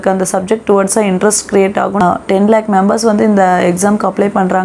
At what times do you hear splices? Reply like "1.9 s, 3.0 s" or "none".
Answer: 2.0 s